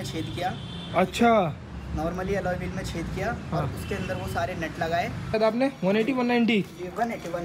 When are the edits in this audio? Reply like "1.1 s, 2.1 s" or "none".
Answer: 5.3 s